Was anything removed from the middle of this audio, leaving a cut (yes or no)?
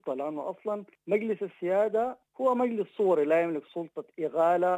yes